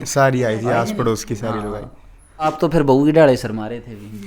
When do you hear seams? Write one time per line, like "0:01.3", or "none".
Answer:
0:02.6